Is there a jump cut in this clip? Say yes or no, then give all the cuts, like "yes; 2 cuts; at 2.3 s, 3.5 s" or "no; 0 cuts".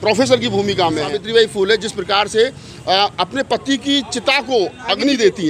yes; 1 cut; at 1.2 s